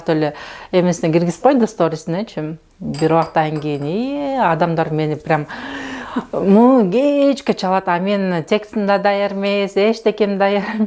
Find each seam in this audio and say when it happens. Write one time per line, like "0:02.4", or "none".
none